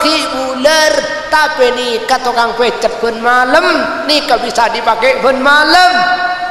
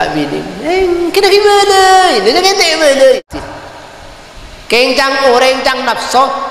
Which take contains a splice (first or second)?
second